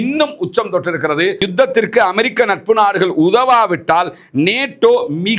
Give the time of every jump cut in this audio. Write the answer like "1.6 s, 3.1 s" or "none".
1.4 s